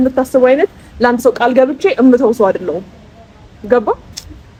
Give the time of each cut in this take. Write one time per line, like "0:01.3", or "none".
none